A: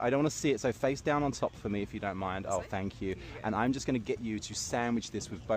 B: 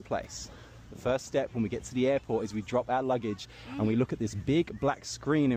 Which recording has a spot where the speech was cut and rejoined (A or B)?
A